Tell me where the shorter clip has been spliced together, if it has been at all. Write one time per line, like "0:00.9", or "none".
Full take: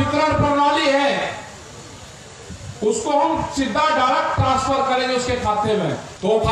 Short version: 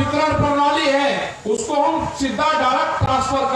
0:01.3